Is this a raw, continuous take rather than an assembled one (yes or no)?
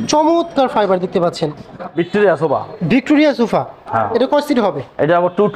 no